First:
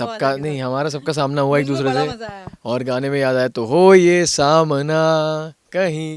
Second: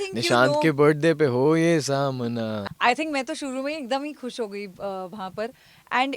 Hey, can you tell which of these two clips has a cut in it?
second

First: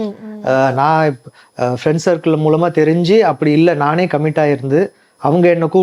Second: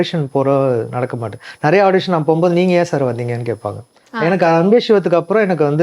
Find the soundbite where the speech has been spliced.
second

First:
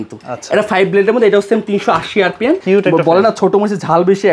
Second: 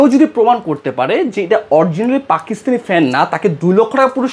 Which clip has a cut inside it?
first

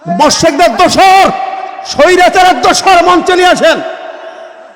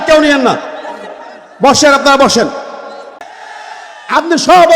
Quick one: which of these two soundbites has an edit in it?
second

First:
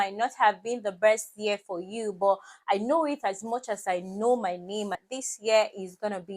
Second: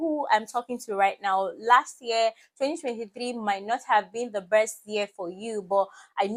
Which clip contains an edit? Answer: first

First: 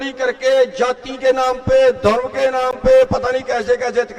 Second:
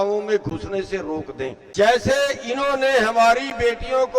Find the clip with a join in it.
second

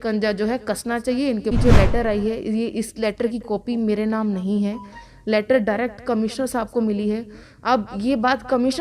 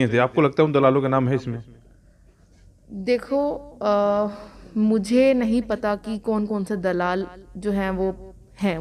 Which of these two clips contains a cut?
first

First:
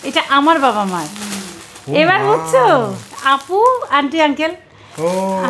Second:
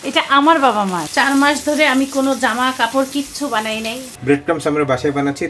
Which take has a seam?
second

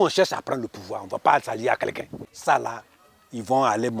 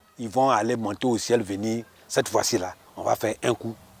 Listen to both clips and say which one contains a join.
first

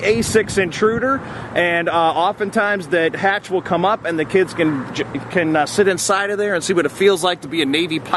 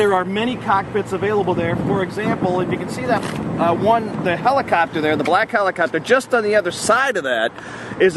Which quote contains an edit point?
second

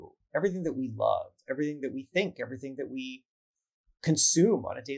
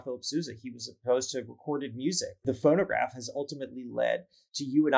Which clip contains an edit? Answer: second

